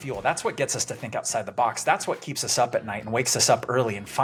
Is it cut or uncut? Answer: uncut